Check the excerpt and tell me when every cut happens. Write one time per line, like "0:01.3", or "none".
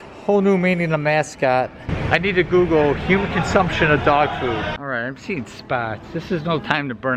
0:01.9
0:04.7

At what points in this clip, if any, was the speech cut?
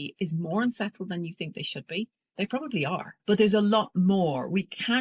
0:02.2
0:03.1

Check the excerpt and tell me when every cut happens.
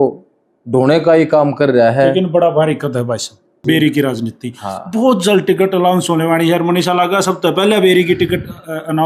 0:03.6

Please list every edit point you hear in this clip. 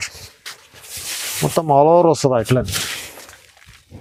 none

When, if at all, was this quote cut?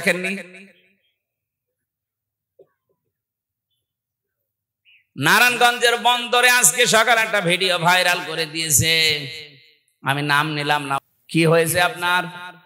0:11.0

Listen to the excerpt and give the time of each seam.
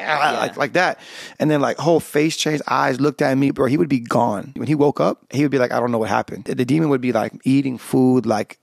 0:03.5
0:04.6
0:05.2
0:06.5

